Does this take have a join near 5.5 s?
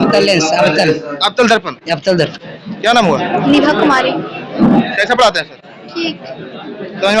no; 1 cut; at 2.3 s

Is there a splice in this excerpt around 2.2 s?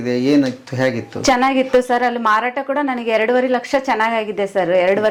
no; 0 cuts

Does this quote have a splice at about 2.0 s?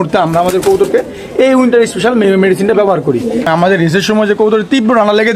no; 1 cut; at 3.5 s

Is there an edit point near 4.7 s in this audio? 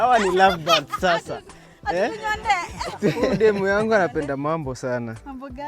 no; 1 cut; at 3.3 s

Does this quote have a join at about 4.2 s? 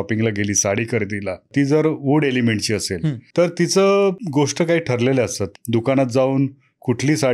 yes; 4 cuts; at 1.5 s, 3.2 s, 4.2 s, 5.5 s

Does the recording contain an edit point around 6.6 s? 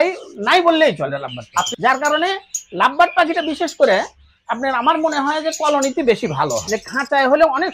yes; 2 cuts; at 1.7 s, 6.6 s

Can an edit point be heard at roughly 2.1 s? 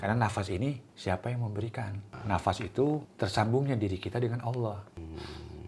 yes; 4 cuts; at 0.9 s, 2.1 s, 3.1 s, 5.0 s

